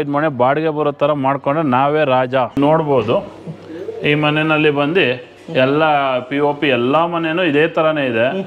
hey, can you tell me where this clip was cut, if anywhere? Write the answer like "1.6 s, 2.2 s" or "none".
2.6 s